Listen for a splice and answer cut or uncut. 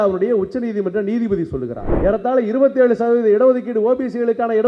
cut